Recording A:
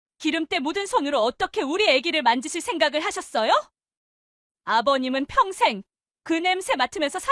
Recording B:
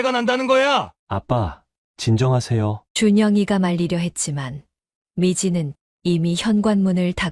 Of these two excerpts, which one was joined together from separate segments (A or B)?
B